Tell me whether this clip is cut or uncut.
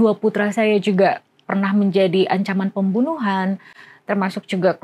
uncut